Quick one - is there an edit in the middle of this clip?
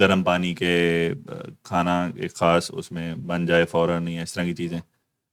no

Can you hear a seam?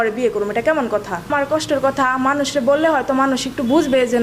yes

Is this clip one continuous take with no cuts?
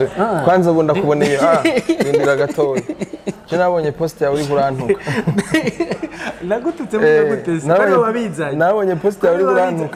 yes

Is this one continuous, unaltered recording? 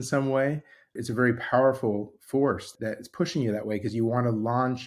no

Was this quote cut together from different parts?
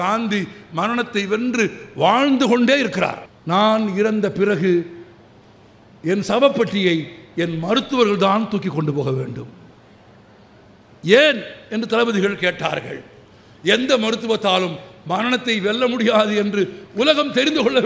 yes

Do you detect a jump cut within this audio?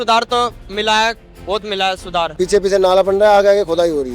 yes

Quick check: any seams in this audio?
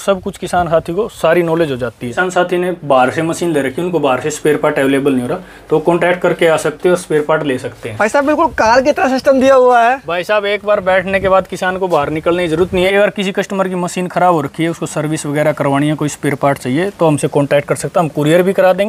yes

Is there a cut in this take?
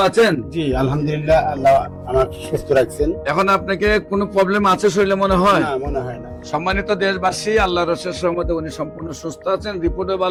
no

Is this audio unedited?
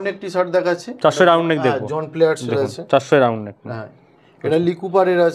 yes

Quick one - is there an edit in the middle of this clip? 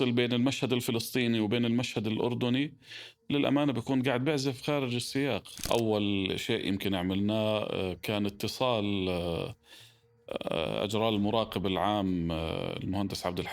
yes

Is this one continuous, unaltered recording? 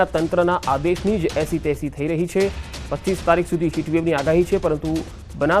no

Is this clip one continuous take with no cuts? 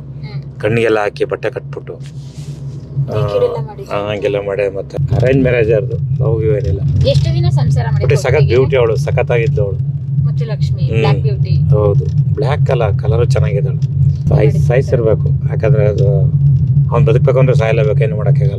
no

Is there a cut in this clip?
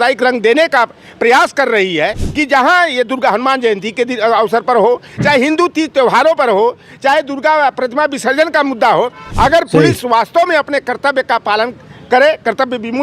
yes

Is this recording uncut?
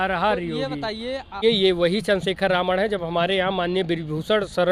no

